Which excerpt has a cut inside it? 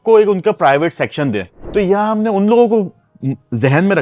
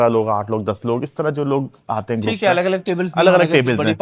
first; 1 cut; at 1.5 s

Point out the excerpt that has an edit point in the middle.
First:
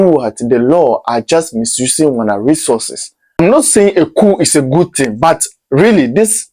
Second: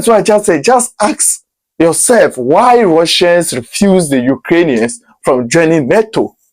first; 1 cut; at 3.4 s

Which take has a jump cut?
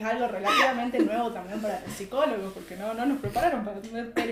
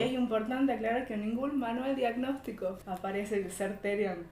second; 1 cut; at 2.8 s

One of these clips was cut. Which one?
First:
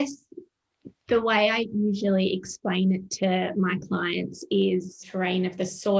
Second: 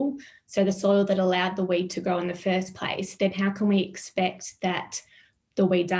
first; 1 cut; at 5.1 s

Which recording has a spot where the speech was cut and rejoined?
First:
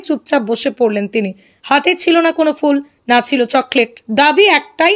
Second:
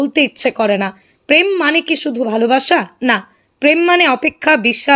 second; 1 cut; at 1.1 s

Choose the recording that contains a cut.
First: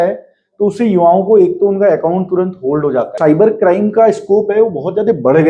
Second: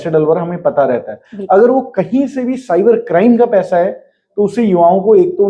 first; 1 cut; at 3.1 s

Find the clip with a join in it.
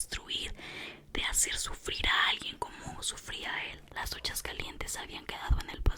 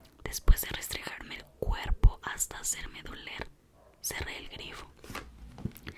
first; 1 cut; at 3.8 s

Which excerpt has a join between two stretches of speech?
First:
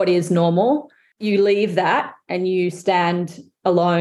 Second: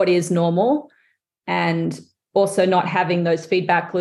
first; 1 cut; at 1.1 s

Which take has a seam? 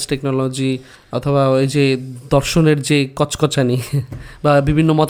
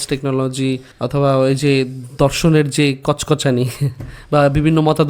second; 1 cut; at 0.9 s

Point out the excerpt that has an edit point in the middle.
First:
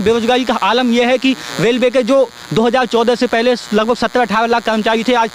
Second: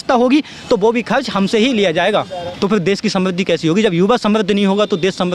second; 1 cut; at 2.4 s

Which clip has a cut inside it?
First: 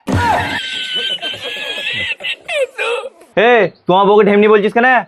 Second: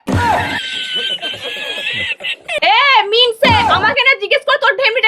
second; 1 cut; at 2.6 s

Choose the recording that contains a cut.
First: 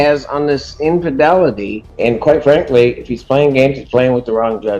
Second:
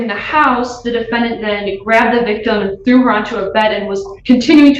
first; 1 cut; at 1.8 s

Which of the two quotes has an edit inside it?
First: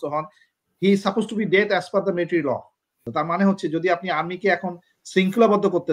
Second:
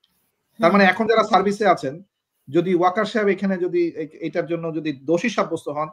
first; 1 cut; at 3.0 s

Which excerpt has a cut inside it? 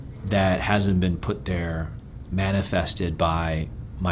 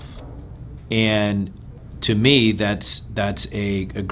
first; 1 cut; at 2.2 s

